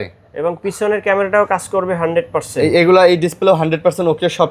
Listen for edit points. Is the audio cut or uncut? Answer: uncut